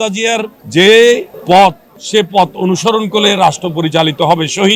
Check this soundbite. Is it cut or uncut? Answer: uncut